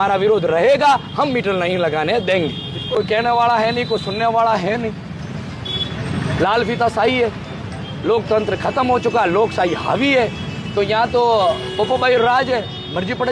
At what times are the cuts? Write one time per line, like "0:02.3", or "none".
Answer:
0:02.9